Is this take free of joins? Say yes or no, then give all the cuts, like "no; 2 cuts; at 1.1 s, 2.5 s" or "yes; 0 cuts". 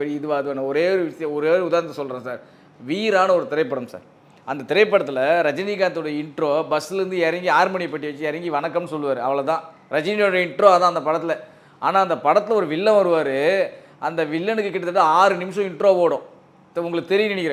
yes; 0 cuts